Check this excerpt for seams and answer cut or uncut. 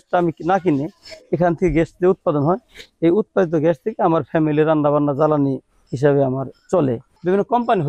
uncut